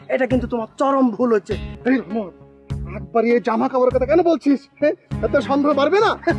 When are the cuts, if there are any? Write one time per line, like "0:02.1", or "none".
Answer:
0:01.7